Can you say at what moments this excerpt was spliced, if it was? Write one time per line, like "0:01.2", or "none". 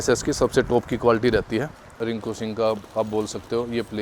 0:01.9